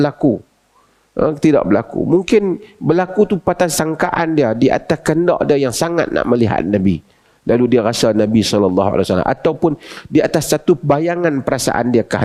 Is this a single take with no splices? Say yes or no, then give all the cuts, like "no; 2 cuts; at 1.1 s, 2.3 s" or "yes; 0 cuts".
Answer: yes; 0 cuts